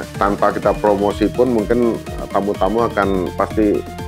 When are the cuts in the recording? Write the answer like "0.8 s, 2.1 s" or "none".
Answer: none